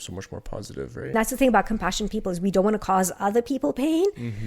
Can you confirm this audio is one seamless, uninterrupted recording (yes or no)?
no